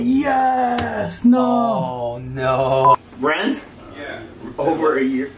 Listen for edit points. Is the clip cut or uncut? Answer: cut